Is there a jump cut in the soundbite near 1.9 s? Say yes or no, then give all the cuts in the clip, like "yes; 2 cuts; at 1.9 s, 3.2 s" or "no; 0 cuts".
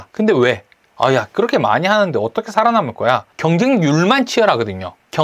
no; 1 cut; at 3.3 s